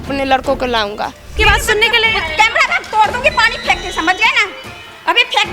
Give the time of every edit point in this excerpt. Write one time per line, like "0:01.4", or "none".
0:01.4